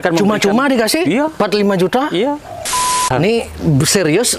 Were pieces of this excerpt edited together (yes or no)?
yes